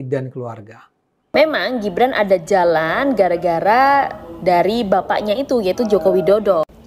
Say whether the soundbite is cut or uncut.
cut